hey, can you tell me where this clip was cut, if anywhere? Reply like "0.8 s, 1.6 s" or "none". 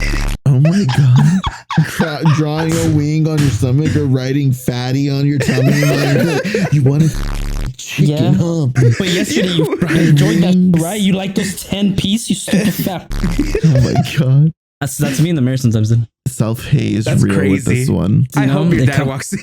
18.3 s